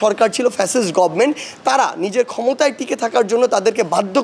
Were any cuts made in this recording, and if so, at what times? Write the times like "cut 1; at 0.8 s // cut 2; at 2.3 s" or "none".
none

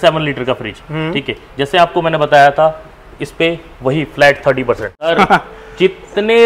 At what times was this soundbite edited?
cut 1; at 5.1 s

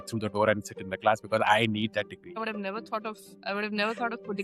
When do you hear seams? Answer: cut 1; at 2.4 s

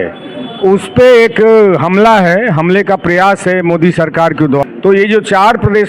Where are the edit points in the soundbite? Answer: cut 1; at 4.6 s

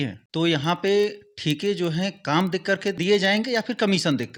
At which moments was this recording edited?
none

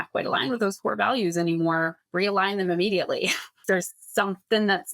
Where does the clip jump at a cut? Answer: cut 1; at 2.0 s // cut 2; at 3.9 s

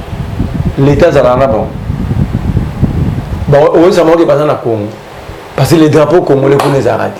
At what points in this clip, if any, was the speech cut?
none

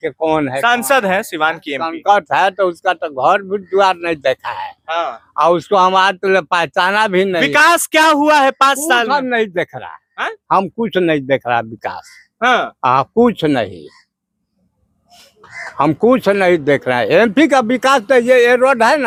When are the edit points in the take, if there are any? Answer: none

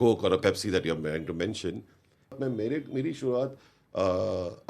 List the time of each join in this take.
cut 1; at 2.4 s

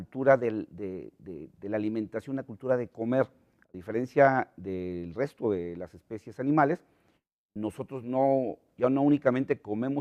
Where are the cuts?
none

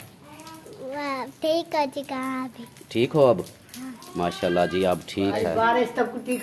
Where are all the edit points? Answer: cut 1; at 5.4 s

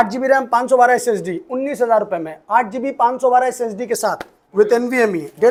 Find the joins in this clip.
none

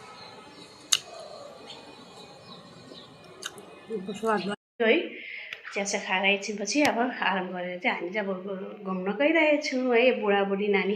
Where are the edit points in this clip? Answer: cut 1; at 4.6 s

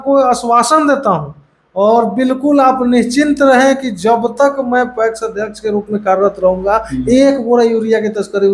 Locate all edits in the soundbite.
none

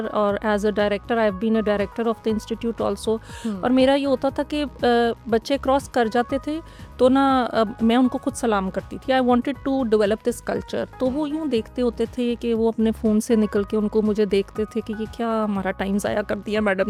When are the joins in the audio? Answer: none

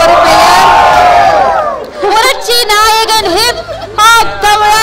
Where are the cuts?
cut 1; at 1.9 s

